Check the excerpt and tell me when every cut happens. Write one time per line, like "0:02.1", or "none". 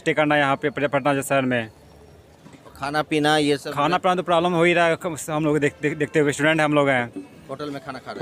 none